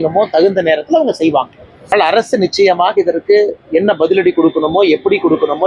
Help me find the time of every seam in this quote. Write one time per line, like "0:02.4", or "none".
0:01.9